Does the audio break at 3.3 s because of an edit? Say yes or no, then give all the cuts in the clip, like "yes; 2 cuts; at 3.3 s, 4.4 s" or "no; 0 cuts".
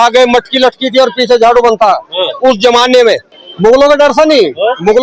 yes; 1 cut; at 3.3 s